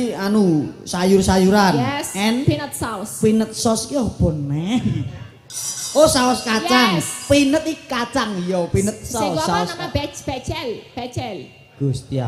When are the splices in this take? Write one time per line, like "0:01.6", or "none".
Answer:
none